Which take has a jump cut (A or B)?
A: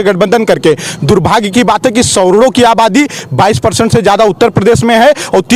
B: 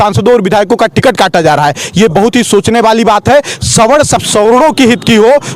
B